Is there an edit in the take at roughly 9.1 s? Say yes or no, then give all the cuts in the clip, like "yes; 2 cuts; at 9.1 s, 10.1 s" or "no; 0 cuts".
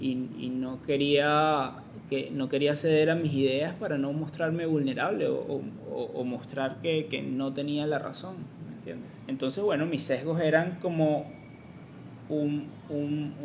yes; 1 cut; at 9.1 s